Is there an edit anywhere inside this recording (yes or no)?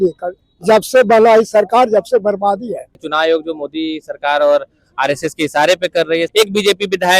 yes